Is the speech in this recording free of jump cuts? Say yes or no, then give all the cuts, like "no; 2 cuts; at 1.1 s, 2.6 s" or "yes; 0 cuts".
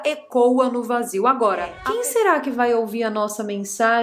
no; 1 cut; at 1.8 s